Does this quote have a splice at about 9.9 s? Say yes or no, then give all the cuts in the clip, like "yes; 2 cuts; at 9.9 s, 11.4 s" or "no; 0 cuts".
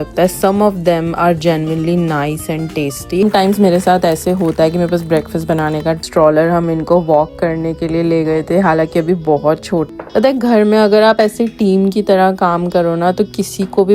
yes; 3 cuts; at 3.2 s, 6.0 s, 9.9 s